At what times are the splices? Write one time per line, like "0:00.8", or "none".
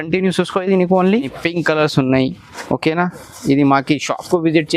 0:01.3